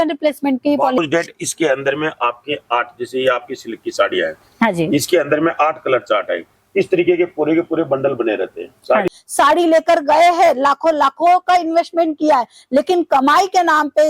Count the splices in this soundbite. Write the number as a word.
two